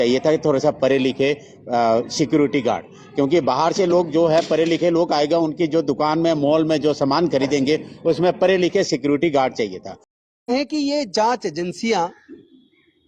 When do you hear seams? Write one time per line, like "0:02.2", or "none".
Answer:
0:10.3